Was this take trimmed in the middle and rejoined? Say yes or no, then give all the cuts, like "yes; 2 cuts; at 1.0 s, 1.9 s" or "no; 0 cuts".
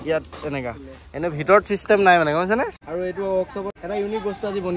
yes; 2 cuts; at 2.8 s, 3.8 s